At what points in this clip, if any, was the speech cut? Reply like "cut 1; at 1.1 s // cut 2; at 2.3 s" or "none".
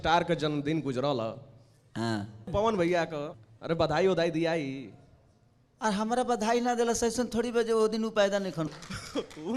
cut 1; at 2.5 s // cut 2; at 3.3 s // cut 3; at 8.7 s